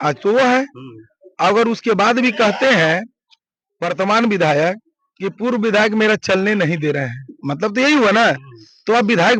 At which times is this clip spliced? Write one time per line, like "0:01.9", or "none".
none